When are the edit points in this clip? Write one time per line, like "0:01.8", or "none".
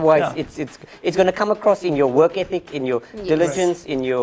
none